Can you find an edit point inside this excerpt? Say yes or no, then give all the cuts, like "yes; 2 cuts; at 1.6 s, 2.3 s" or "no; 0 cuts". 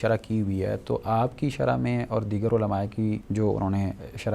yes; 1 cut; at 3.2 s